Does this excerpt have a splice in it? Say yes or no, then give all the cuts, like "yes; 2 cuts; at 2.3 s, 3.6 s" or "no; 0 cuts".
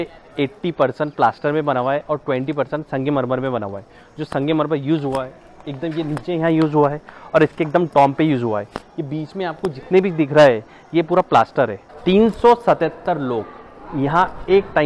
yes; 1 cut; at 11.9 s